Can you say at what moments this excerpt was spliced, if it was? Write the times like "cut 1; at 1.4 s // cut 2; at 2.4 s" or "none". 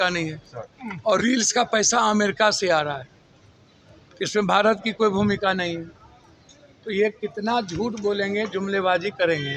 none